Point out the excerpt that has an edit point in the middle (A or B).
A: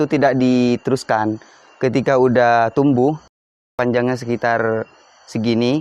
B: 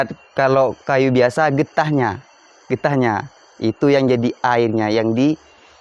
A